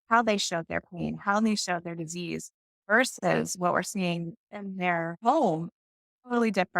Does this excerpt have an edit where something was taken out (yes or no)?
yes